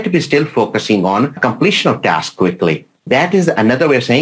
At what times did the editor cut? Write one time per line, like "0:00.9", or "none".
0:01.4
0:03.0